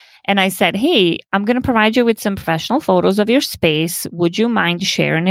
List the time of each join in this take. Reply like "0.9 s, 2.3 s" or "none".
none